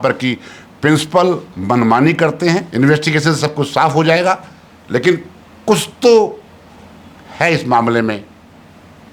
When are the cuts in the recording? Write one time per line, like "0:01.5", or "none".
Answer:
0:02.7